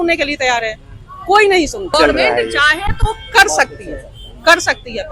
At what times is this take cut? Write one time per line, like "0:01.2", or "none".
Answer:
0:01.9